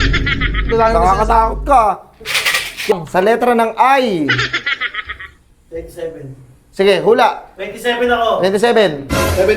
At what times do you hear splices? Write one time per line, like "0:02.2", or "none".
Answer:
0:02.9